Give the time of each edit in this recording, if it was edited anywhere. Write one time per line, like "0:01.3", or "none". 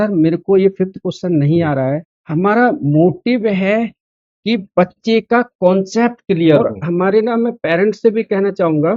0:01.8
0:06.6